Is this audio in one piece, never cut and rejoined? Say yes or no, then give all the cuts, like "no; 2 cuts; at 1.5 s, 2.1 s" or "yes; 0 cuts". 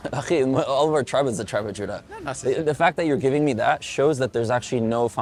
yes; 0 cuts